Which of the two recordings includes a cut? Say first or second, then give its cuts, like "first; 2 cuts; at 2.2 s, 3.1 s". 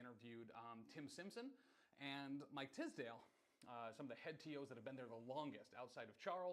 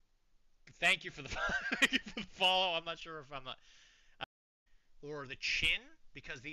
second; 1 cut; at 4.3 s